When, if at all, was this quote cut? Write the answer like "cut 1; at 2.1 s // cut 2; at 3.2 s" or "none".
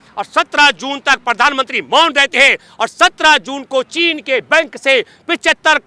none